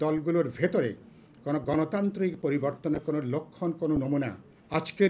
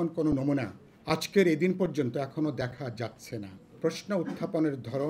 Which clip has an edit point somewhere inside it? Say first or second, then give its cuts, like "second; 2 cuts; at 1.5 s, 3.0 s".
second; 1 cut; at 3.8 s